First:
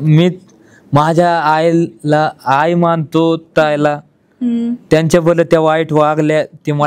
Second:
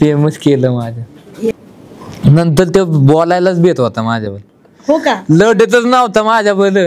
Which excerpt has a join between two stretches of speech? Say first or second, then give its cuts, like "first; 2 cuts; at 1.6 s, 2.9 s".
second; 1 cut; at 1.5 s